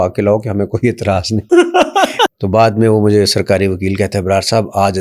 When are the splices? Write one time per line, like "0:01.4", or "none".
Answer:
0:01.4
0:02.3